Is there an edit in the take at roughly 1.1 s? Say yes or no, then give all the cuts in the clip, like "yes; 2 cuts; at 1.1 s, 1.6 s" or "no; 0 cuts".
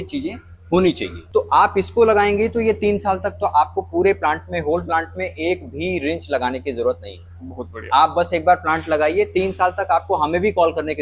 yes; 1 cut; at 1.1 s